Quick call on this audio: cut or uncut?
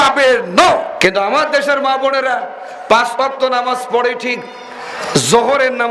cut